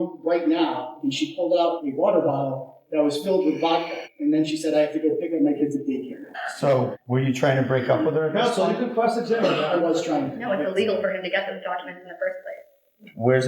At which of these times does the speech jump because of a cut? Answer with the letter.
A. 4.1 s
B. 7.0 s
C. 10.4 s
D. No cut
C